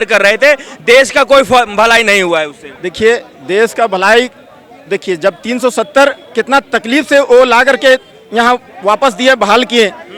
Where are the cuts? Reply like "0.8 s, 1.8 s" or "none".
none

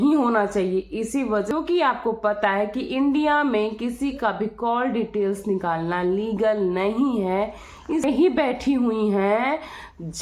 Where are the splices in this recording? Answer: 1.5 s, 8.0 s

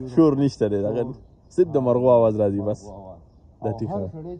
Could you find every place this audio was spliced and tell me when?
none

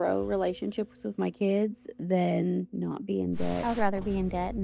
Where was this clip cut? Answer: 3.6 s

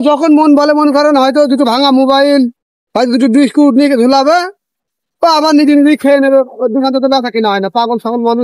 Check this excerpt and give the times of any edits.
none

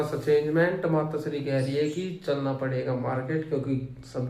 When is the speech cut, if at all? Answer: none

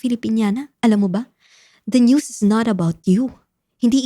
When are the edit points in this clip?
none

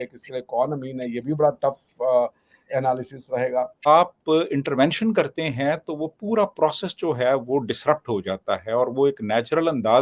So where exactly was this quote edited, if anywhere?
3.9 s

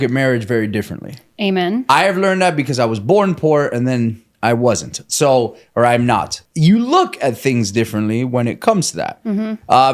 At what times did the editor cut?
6.4 s

